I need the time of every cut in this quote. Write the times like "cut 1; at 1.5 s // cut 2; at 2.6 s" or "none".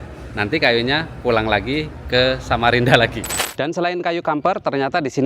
cut 1; at 3.3 s

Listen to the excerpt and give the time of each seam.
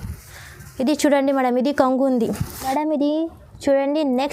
cut 1; at 2.5 s

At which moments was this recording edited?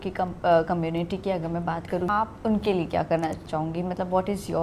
cut 1; at 2.1 s // cut 2; at 3.4 s

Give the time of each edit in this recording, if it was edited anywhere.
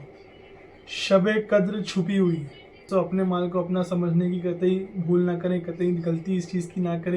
cut 1; at 2.9 s

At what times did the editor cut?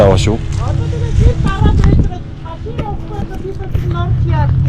none

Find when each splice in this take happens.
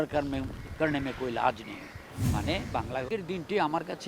cut 1; at 3.1 s

